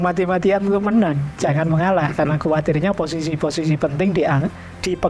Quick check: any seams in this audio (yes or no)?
no